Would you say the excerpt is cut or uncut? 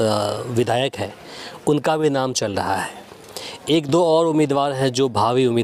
uncut